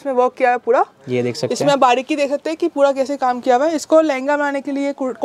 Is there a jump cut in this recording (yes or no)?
no